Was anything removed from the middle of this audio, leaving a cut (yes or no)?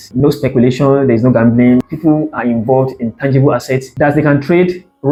no